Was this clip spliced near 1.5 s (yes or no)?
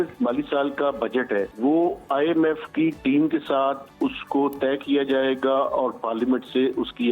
yes